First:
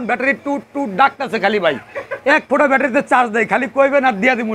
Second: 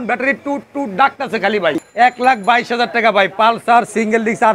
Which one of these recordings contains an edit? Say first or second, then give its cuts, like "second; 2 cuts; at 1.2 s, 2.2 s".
second; 1 cut; at 1.8 s